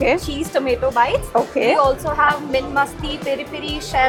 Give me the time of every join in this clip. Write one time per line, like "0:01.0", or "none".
none

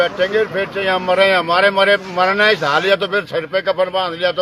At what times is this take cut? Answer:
none

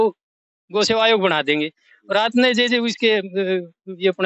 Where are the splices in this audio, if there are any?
none

